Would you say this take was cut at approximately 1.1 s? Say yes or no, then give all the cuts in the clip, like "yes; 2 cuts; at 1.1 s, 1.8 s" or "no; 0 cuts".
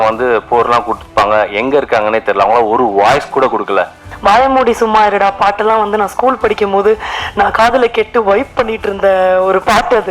no; 1 cut; at 4.0 s